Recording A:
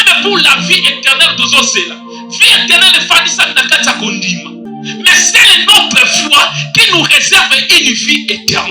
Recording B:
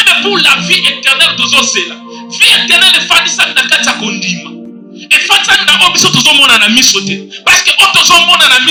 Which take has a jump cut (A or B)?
A